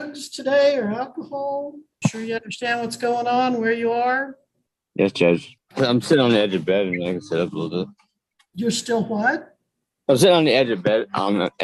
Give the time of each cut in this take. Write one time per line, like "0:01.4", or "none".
0:01.8
0:05.6